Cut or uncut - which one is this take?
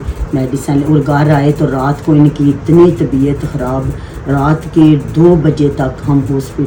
uncut